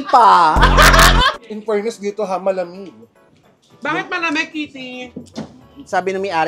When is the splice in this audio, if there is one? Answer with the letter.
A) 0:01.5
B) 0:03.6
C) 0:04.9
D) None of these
A